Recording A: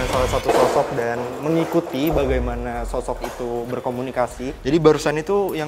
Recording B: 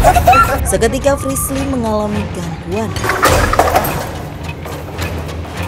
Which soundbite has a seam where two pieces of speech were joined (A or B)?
A